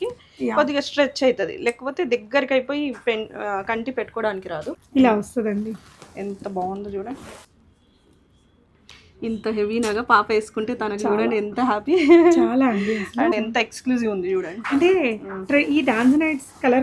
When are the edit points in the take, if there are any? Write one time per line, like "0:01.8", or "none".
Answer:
0:04.8
0:07.5
0:13.3